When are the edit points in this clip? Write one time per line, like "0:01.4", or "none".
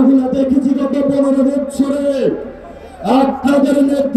none